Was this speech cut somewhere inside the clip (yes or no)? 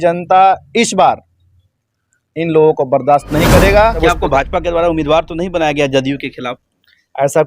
yes